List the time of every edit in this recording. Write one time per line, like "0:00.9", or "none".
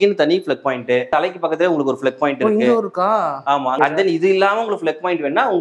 0:01.1
0:03.7